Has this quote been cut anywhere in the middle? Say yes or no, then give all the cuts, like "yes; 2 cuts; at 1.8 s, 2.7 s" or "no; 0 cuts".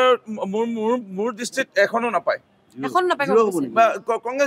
no; 0 cuts